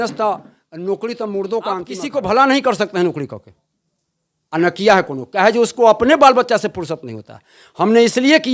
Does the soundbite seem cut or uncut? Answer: cut